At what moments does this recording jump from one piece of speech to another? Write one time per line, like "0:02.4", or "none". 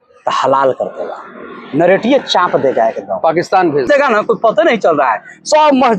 0:03.9